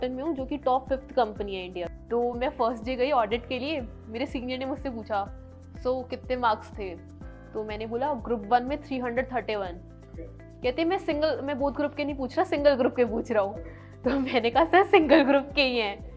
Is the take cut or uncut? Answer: cut